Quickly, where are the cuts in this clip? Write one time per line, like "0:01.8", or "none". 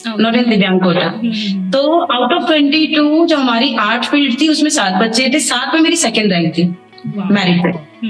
none